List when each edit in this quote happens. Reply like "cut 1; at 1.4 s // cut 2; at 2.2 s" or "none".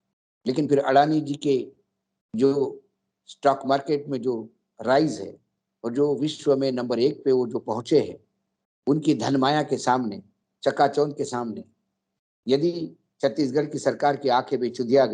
none